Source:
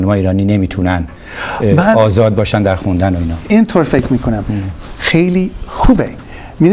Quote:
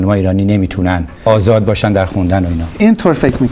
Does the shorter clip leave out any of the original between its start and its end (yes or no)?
yes